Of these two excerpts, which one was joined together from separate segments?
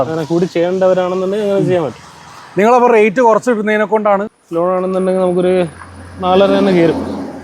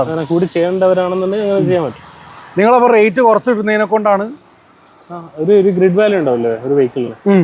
first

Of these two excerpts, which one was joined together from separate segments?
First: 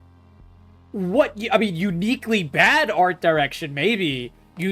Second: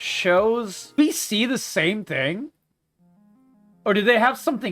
second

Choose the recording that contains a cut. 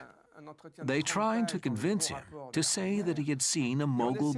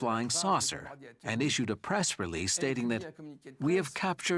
first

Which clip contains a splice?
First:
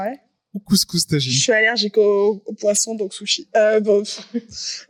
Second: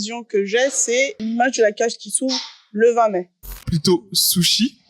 second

